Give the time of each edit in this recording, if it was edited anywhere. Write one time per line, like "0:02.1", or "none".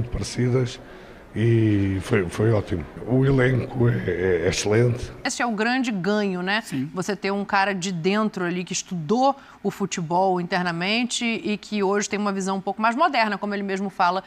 0:05.2